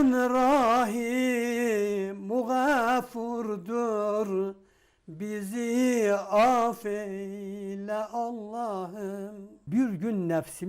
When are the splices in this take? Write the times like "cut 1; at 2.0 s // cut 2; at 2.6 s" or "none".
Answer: cut 1; at 9.6 s